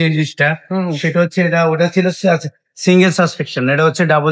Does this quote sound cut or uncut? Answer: uncut